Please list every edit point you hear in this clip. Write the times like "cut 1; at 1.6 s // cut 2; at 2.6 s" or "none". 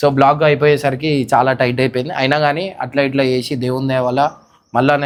none